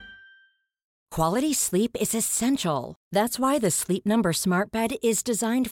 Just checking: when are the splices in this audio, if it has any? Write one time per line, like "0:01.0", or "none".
0:01.0